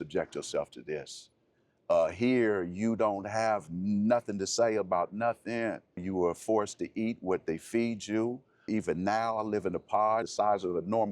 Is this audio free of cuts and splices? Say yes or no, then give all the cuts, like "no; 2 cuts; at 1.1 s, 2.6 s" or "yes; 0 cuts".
no; 3 cuts; at 6.0 s, 8.7 s, 10.3 s